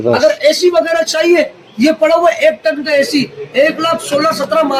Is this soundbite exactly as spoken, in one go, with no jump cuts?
yes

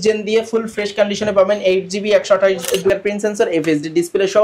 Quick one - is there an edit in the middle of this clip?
yes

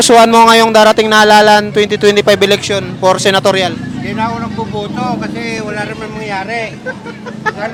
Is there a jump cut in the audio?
no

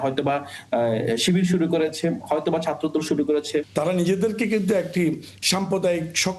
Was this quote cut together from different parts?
yes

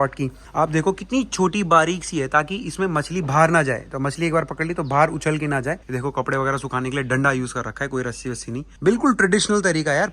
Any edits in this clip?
yes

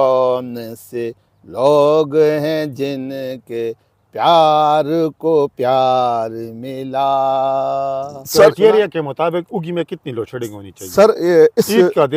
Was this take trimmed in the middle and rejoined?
yes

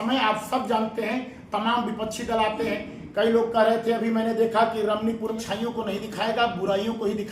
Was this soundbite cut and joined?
yes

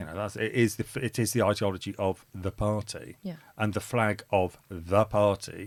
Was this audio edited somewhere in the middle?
no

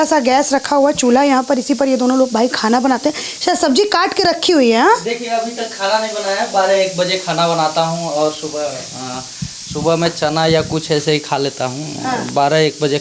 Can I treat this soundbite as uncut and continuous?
yes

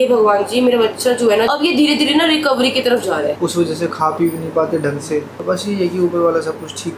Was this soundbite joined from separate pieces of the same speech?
yes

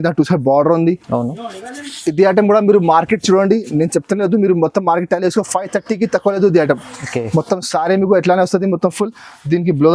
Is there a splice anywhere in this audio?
no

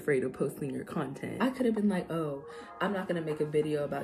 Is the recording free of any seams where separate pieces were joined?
no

